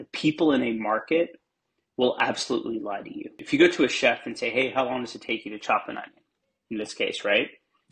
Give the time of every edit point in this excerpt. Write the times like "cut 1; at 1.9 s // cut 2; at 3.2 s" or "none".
cut 1; at 3.4 s